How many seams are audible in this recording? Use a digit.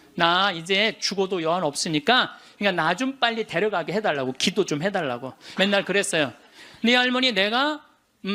2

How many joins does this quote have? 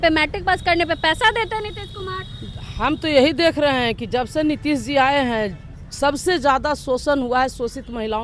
0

